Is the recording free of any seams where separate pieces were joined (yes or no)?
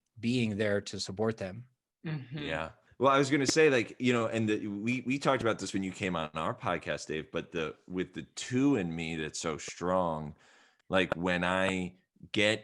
no